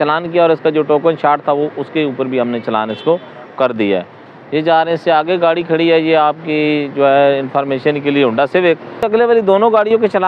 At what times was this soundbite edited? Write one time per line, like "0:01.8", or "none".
none